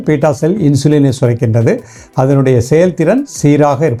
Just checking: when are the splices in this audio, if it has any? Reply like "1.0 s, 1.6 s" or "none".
none